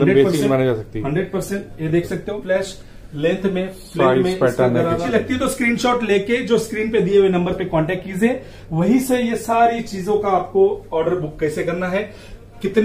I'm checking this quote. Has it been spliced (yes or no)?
yes